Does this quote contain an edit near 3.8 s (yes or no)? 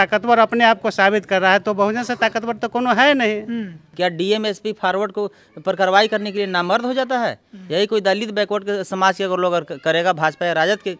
yes